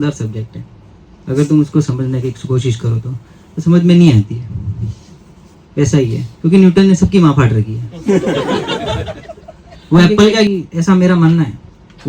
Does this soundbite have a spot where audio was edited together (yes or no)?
yes